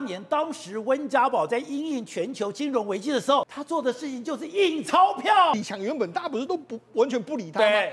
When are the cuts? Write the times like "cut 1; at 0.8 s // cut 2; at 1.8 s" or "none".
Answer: cut 1; at 3.4 s // cut 2; at 5.5 s